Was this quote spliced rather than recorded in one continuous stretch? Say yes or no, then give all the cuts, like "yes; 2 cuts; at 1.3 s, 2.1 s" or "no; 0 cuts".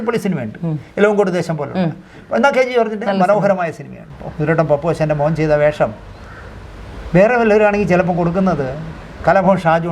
yes; 1 cut; at 4.1 s